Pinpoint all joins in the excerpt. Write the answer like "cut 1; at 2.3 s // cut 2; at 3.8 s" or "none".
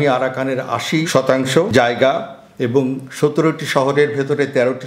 cut 1; at 1.1 s